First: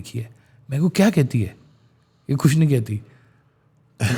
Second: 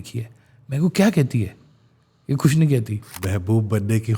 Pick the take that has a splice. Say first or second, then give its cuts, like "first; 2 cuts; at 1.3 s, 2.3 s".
second; 1 cut; at 3.1 s